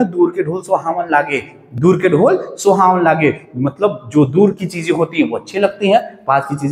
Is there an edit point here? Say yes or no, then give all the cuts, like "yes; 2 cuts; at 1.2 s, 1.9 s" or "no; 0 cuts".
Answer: no; 0 cuts